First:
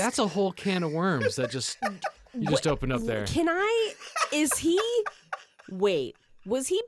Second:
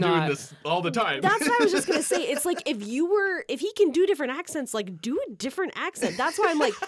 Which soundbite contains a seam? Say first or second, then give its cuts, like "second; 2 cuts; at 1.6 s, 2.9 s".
second; 1 cut; at 3.5 s